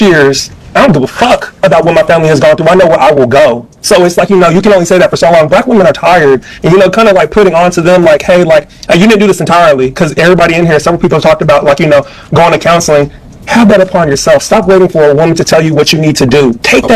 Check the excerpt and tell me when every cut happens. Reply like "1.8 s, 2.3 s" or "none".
none

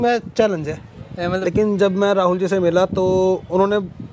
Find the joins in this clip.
1.4 s

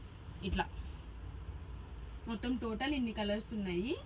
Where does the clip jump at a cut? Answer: none

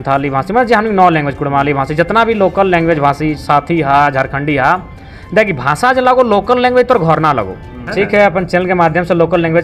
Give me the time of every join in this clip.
7.8 s

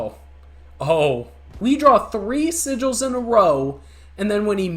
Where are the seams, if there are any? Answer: 1.6 s

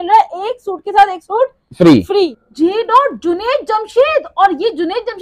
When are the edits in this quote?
2.3 s

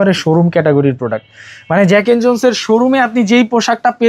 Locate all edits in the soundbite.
none

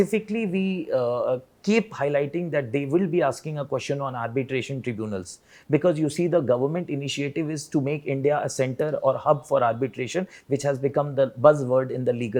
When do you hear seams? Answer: none

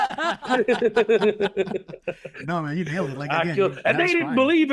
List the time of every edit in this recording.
none

